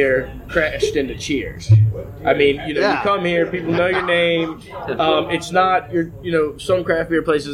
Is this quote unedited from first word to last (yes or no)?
yes